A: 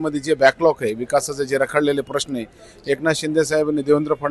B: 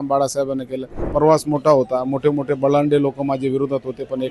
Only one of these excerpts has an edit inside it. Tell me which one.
B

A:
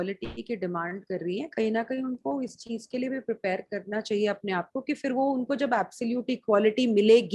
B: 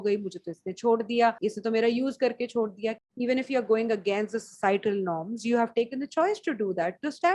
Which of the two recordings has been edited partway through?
B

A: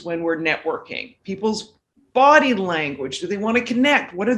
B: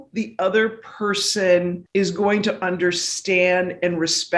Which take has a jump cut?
B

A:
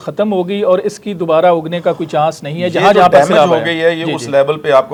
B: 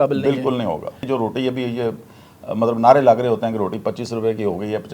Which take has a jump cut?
B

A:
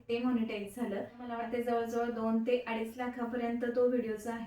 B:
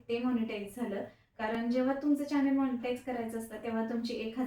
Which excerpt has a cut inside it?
A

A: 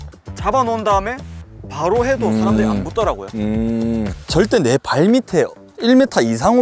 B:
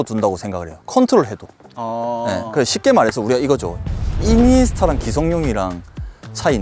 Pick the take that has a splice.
A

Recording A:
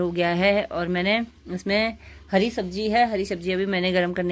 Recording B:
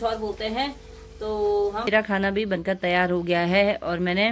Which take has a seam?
B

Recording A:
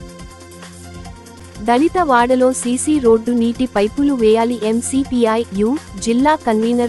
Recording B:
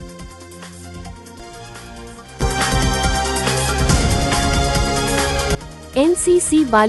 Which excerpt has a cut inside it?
B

